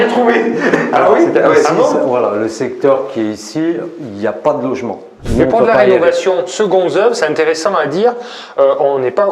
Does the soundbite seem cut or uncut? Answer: cut